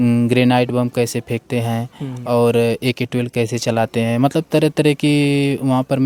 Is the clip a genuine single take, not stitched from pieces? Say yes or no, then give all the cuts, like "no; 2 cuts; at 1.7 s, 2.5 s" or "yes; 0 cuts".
yes; 0 cuts